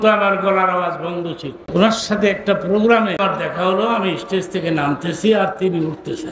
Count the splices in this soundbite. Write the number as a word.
two